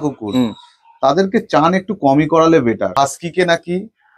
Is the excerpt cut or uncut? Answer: cut